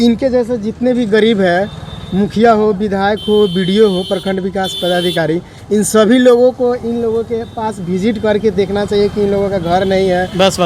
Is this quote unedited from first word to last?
yes; 0 cuts

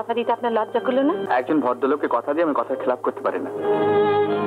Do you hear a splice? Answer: yes; 1 cut; at 1.2 s

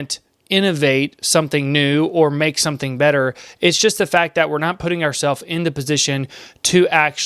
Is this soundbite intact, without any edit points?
yes; 0 cuts

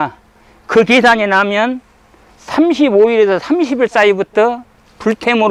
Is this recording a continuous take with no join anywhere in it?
yes; 0 cuts

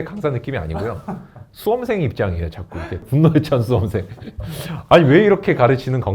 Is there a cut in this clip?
yes; 1 cut; at 3.0 s

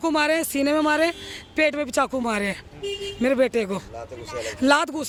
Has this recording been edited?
no; 0 cuts

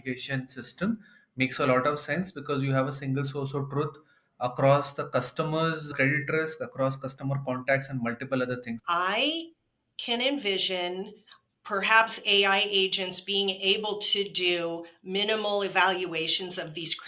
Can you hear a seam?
yes; 1 cut; at 8.8 s

